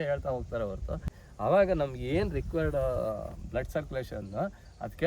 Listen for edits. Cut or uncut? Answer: cut